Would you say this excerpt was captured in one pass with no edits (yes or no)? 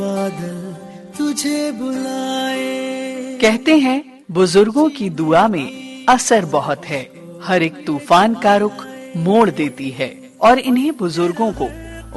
yes